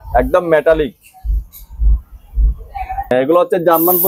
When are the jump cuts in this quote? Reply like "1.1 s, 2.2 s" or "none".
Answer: 3.1 s

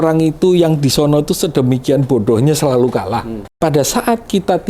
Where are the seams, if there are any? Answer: 3.4 s

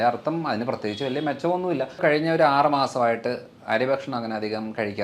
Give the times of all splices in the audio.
2.0 s

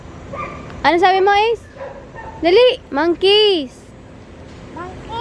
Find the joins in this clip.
none

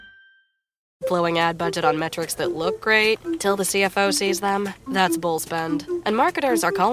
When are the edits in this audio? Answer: 1.0 s

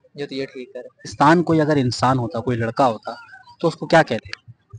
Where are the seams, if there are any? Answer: 1.1 s

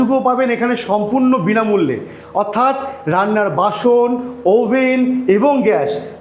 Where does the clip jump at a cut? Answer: none

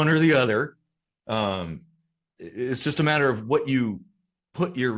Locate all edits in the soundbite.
none

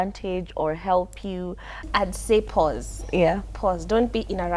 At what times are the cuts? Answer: 1.9 s

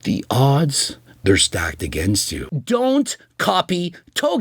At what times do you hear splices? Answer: 2.4 s

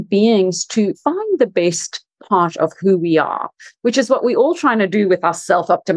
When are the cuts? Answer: 1.0 s

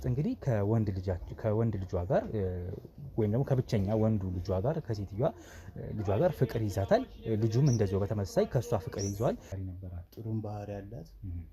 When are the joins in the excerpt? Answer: 9.5 s

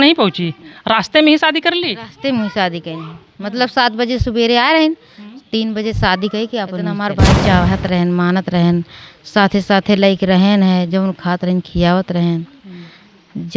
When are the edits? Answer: 7.3 s

